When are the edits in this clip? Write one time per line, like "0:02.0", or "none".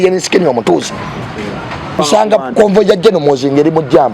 0:02.0